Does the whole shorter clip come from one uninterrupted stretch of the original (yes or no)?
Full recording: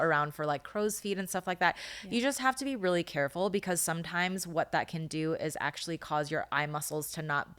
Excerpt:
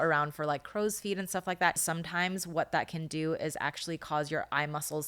no